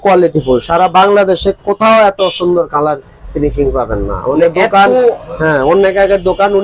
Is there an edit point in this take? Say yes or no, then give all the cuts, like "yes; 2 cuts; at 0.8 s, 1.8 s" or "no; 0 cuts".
no; 0 cuts